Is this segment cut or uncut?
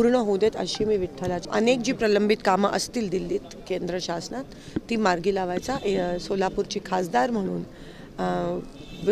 cut